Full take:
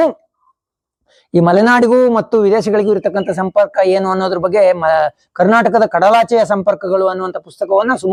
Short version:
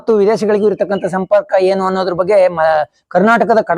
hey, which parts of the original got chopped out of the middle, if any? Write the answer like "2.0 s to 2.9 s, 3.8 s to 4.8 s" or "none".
none